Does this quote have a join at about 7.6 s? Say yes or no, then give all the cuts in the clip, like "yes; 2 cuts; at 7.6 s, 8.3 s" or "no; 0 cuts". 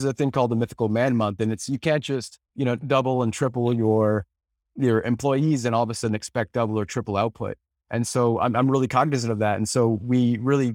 no; 0 cuts